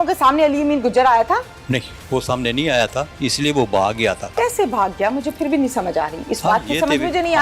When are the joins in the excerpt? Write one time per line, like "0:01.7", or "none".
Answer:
0:01.6
0:04.4

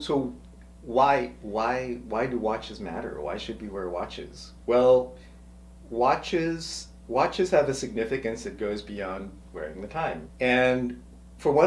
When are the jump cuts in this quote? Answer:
0:10.2

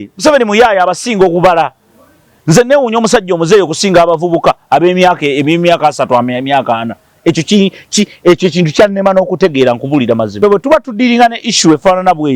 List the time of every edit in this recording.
0:10.3

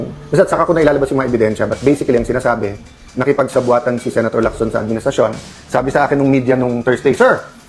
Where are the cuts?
0:05.5

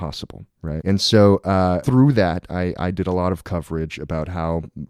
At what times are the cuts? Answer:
0:00.8
0:01.8

